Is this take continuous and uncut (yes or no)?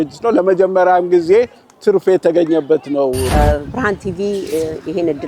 no